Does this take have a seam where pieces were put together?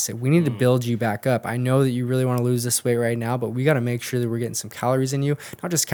no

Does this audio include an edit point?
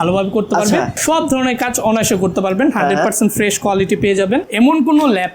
yes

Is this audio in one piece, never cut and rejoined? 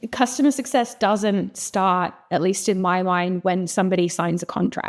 yes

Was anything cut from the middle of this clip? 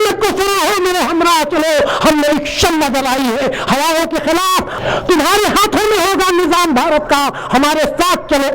yes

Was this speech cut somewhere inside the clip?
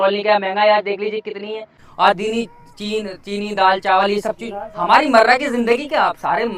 no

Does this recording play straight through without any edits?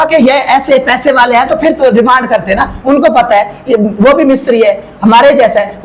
yes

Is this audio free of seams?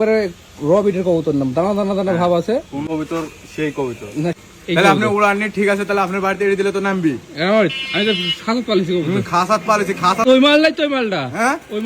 no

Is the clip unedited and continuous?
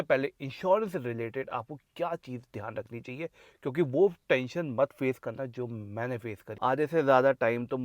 no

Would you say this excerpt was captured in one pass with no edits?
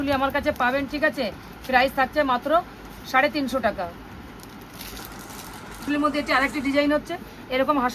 yes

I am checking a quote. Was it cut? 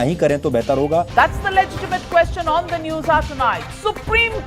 yes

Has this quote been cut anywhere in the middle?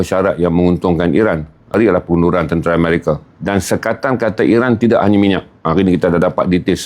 yes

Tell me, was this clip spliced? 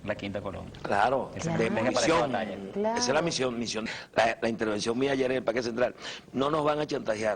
no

